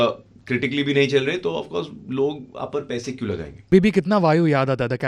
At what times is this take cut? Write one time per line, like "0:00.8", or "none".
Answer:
0:03.7